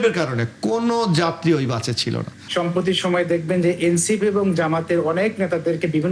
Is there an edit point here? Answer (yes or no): yes